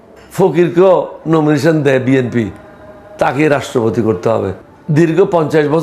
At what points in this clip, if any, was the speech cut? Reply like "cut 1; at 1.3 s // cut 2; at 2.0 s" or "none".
cut 1; at 4.6 s